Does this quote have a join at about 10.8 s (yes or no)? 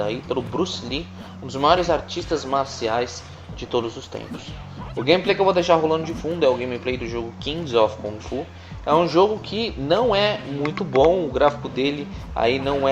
yes